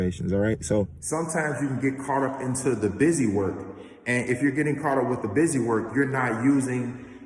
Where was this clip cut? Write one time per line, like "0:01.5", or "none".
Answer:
0:00.9